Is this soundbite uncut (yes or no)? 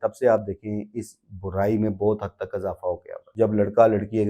no